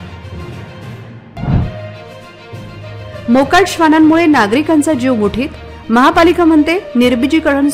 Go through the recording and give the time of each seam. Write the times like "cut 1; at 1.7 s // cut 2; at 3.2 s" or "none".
cut 1; at 1.2 s